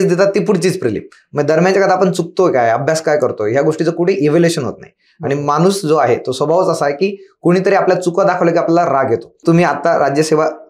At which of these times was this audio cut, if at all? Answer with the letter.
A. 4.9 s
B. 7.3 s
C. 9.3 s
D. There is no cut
C